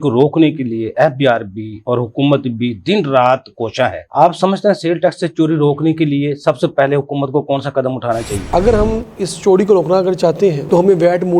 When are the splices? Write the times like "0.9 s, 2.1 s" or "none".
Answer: 8.4 s